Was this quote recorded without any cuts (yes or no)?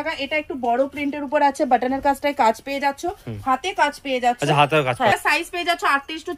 yes